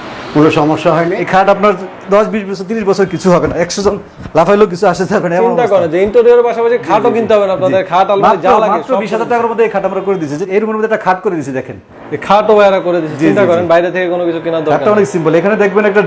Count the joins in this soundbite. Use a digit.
2